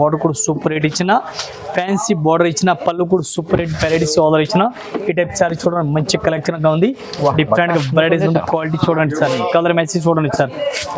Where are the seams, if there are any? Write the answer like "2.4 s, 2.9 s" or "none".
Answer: none